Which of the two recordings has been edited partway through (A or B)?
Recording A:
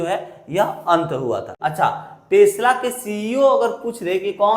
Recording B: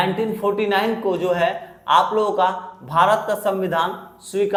A